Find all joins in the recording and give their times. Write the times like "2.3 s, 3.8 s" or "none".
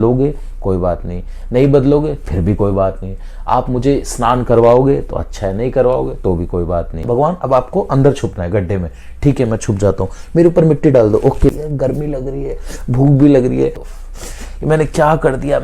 7.0 s, 11.5 s, 13.9 s